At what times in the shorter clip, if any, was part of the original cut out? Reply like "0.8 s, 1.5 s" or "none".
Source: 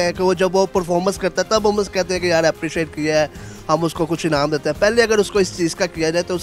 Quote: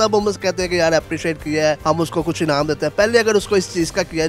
1.8 s